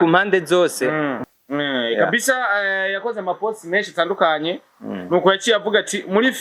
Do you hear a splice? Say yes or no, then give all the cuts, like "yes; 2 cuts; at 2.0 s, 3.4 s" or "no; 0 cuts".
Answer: yes; 1 cut; at 1.2 s